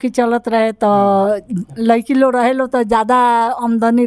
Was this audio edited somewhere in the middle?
no; 0 cuts

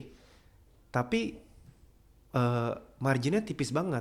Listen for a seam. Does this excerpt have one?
no; 0 cuts

